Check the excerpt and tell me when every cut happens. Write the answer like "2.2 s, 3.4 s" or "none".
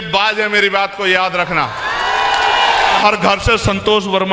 3.0 s